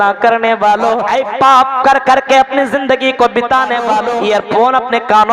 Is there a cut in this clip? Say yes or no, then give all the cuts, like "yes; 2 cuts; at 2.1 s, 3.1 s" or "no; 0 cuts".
yes; 2 cuts; at 1.1 s, 4.1 s